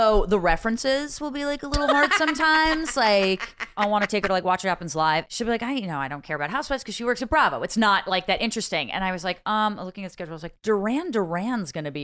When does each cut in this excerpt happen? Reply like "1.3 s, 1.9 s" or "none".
3.7 s, 5.2 s